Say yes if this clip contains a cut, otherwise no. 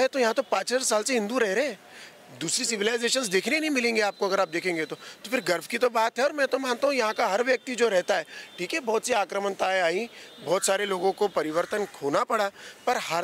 no